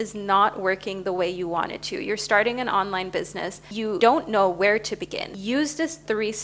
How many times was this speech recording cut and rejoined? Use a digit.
2